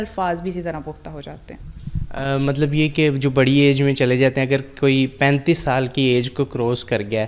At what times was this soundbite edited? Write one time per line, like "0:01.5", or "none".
none